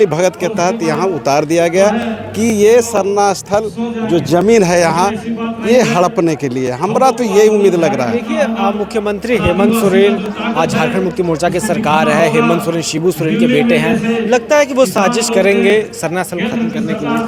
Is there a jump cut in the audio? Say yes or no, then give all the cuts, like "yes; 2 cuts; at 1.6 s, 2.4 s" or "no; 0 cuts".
no; 0 cuts